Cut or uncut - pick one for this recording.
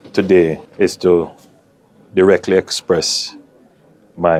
uncut